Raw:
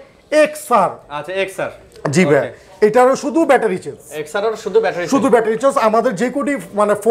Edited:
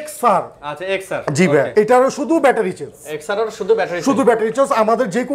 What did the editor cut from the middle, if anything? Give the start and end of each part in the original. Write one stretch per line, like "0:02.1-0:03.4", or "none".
0:01.9-0:02.5